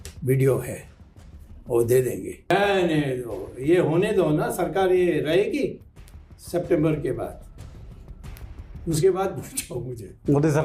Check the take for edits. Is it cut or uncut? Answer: cut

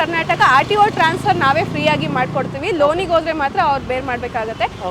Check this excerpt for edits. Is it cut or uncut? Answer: uncut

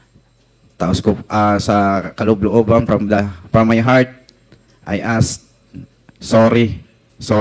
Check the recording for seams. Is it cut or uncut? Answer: uncut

